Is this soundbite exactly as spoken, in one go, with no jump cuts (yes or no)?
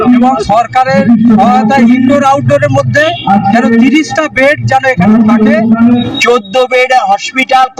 no